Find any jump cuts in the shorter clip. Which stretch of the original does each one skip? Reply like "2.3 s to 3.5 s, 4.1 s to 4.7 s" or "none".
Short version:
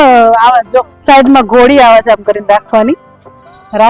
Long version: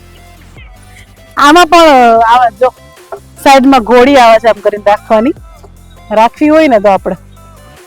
2.8 s to 3.3 s